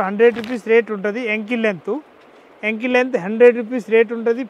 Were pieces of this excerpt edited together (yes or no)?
no